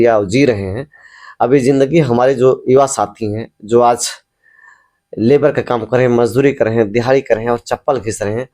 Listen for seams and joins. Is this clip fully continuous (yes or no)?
yes